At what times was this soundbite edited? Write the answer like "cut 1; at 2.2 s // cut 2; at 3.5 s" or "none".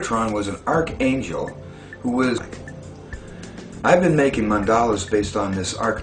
none